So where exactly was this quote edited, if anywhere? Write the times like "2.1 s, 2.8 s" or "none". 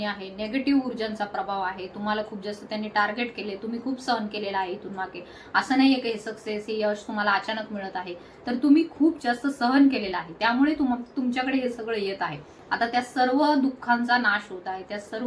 none